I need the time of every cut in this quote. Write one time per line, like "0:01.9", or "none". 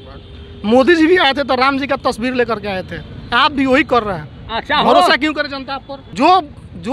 0:06.0